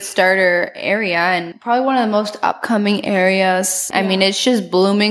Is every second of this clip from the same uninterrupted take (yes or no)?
no